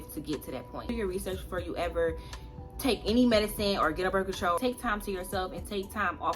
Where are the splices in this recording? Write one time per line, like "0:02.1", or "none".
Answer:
0:00.9
0:04.6